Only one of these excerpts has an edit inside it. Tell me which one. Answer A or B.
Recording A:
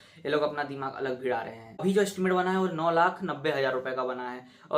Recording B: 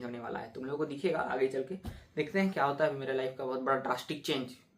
A